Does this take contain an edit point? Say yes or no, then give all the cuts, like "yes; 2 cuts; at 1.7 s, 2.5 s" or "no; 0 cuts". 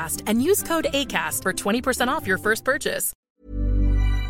yes; 1 cut; at 3.1 s